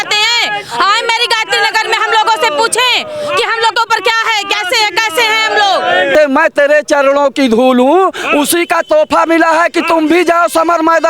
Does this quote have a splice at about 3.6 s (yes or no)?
no